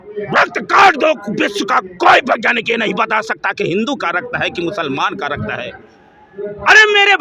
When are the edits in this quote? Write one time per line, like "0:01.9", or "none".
none